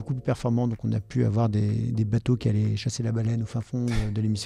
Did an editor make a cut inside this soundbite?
no; 0 cuts

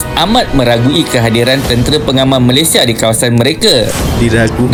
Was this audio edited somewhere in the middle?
no; 0 cuts

